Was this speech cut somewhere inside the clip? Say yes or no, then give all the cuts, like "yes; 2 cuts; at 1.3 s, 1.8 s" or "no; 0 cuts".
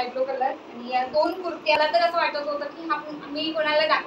yes; 1 cut; at 1.8 s